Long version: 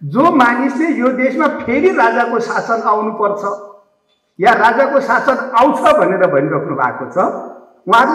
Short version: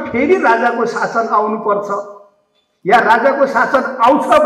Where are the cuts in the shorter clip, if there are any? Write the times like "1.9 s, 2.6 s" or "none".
none